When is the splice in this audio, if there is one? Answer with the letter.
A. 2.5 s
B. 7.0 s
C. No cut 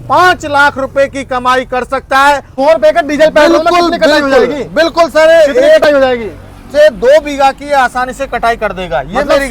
A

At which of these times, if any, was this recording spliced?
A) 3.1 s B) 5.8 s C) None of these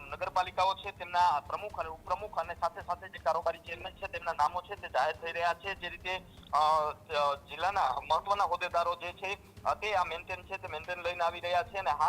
C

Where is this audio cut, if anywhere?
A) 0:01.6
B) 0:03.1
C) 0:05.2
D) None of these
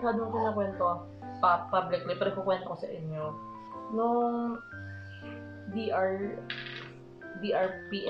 D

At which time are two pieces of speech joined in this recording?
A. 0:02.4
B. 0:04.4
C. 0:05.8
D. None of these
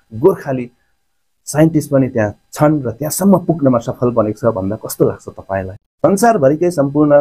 C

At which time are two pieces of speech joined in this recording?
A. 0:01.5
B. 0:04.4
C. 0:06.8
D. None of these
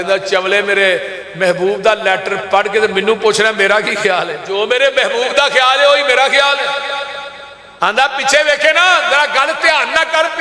B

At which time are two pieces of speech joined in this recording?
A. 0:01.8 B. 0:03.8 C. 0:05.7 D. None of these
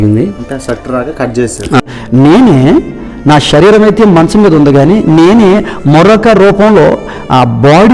A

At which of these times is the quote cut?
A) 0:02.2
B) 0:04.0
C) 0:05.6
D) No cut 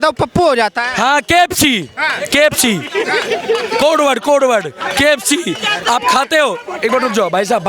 D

